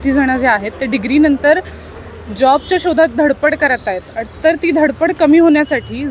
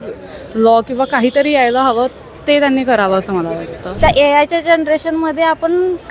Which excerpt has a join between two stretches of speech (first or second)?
second